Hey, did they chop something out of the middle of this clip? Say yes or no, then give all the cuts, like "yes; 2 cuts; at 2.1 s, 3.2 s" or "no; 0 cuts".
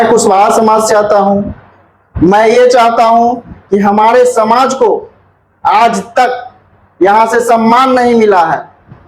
no; 0 cuts